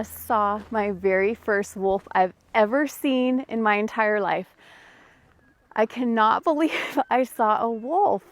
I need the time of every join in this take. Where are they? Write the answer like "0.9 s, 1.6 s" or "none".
none